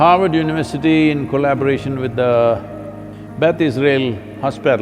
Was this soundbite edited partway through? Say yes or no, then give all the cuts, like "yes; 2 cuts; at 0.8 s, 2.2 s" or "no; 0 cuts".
no; 0 cuts